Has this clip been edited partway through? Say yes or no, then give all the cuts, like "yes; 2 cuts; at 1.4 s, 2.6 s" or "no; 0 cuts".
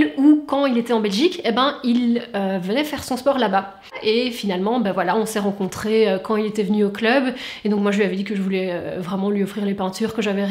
yes; 1 cut; at 3.9 s